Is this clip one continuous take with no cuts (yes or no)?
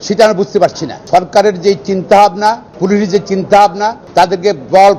no